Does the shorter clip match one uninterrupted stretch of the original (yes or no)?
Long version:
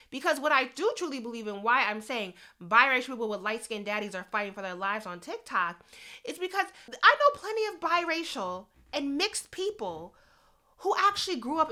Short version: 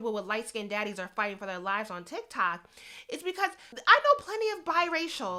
yes